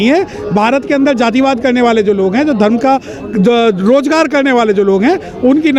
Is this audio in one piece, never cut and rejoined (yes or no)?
yes